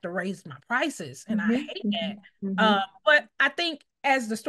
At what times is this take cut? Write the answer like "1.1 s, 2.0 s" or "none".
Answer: none